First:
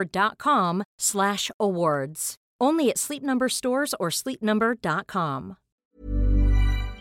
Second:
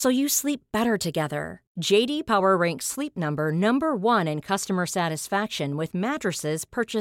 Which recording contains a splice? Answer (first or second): first